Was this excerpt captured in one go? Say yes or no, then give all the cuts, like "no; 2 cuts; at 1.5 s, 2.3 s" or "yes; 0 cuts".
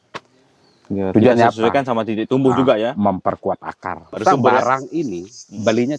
no; 1 cut; at 4.2 s